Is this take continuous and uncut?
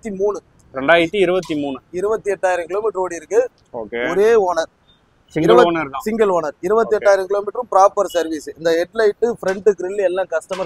yes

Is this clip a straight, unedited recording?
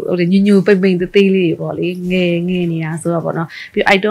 yes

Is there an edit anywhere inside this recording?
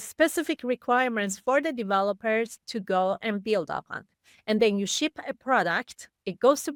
no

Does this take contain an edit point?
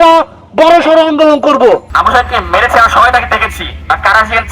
yes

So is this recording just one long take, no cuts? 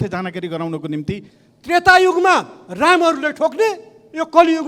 no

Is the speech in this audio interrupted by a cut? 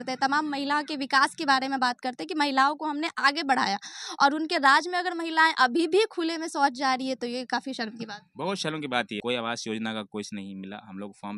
yes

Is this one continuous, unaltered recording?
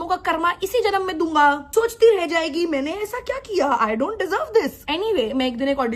yes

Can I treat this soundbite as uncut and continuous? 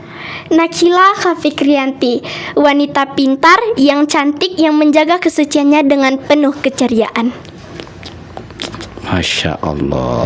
yes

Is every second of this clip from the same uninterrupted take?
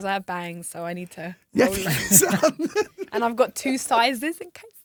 yes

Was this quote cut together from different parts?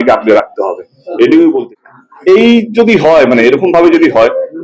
yes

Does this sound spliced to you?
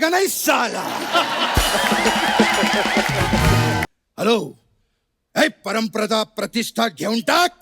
yes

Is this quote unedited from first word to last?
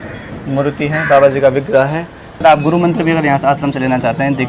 no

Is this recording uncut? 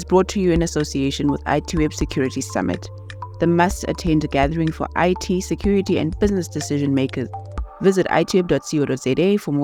yes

